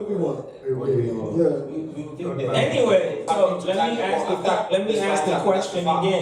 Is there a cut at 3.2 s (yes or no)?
yes